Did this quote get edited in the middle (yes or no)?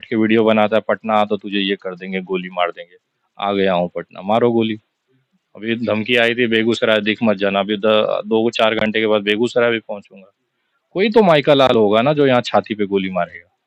no